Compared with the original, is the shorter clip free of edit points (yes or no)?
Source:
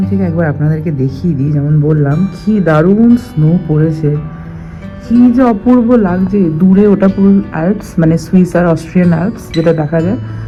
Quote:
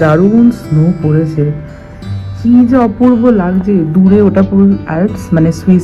yes